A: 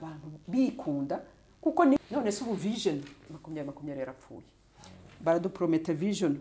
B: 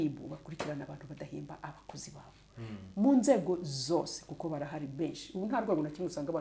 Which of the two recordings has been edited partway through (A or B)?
A